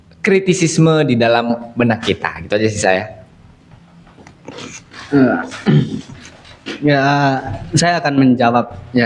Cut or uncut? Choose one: uncut